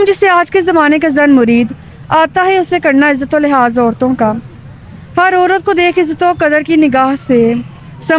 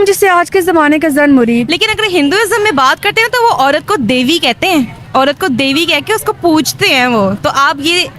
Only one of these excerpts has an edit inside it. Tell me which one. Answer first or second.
second